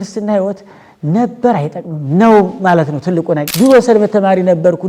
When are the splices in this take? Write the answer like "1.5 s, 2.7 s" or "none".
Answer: 3.5 s